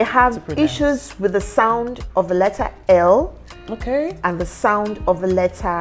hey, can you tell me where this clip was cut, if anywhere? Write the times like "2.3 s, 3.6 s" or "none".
none